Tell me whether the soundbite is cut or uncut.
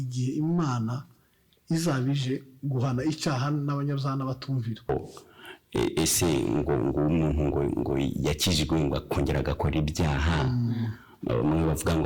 cut